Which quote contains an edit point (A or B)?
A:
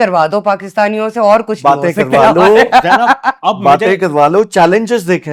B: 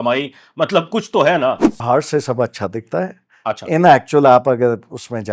B